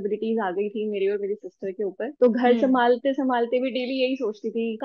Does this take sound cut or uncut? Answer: uncut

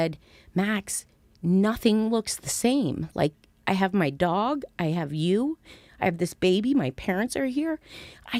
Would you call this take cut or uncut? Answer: uncut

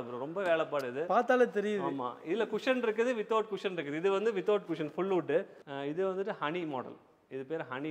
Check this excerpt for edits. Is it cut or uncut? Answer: cut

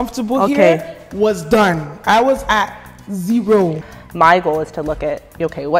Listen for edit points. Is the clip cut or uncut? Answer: cut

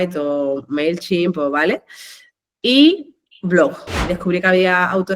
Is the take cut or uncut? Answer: cut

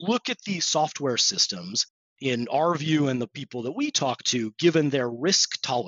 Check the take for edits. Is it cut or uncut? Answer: uncut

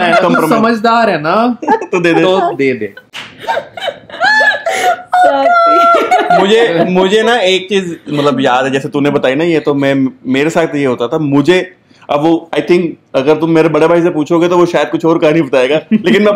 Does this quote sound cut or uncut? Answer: uncut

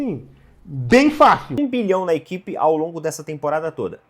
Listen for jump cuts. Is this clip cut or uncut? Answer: cut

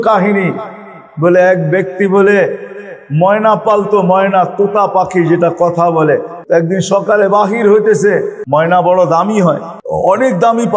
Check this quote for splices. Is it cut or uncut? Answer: cut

